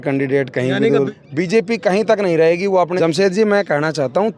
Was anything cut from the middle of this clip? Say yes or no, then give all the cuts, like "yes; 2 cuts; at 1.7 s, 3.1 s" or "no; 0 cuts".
yes; 2 cuts; at 1.1 s, 2.9 s